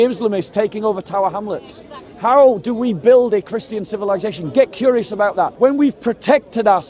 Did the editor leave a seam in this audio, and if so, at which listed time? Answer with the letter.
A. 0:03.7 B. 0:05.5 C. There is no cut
B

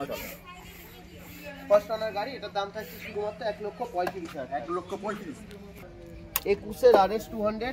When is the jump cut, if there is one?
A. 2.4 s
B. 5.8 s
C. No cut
B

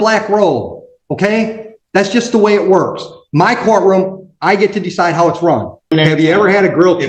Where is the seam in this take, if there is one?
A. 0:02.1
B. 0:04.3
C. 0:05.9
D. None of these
C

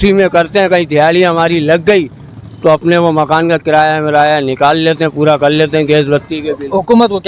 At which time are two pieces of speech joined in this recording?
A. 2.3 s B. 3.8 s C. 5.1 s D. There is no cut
D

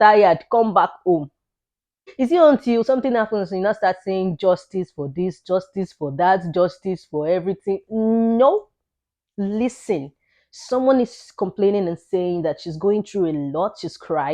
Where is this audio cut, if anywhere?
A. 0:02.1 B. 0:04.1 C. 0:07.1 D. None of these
A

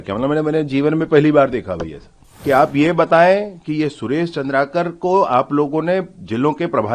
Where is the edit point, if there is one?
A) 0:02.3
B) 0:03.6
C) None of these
A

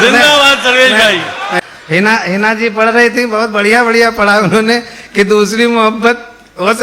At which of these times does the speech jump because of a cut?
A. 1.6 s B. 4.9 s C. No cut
A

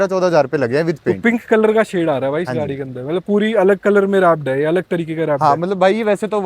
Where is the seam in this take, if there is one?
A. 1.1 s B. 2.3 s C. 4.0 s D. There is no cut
A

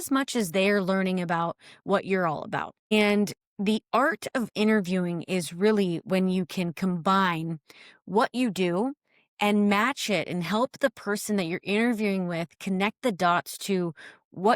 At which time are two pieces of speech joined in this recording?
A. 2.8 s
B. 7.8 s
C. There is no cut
A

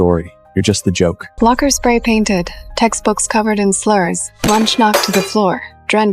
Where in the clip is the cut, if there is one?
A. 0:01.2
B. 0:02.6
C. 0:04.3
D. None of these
A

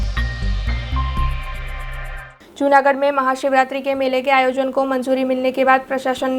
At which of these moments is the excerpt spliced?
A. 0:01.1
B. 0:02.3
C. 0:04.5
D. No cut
B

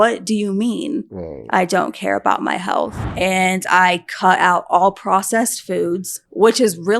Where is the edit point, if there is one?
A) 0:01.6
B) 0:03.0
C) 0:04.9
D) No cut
B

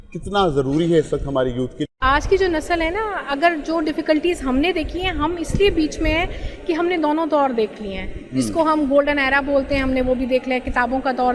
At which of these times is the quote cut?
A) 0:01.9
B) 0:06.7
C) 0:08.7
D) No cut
A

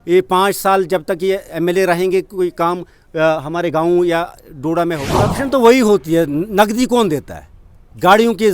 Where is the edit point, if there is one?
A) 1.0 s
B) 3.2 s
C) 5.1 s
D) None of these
C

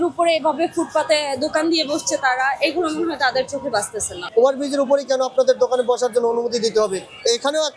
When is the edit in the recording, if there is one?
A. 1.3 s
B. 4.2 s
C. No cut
B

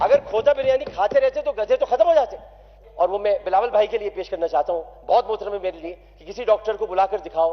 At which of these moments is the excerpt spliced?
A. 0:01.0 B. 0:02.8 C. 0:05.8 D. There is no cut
B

